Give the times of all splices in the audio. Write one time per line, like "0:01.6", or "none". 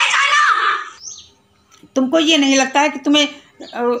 0:00.9